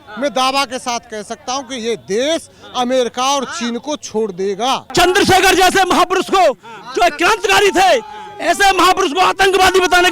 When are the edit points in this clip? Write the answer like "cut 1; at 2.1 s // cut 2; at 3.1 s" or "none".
cut 1; at 4.9 s